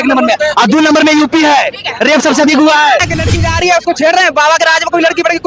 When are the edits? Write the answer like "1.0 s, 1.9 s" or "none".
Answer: 3.1 s